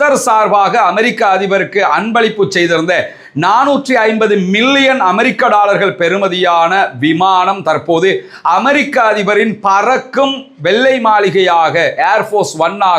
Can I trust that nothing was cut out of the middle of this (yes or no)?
yes